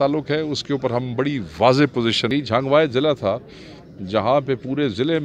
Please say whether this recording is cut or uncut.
cut